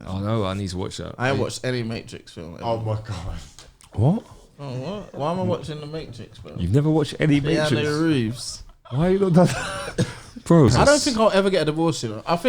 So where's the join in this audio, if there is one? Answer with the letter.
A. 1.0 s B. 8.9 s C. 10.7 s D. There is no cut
C